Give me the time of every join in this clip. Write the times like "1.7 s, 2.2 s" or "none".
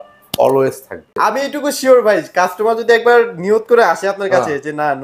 1.1 s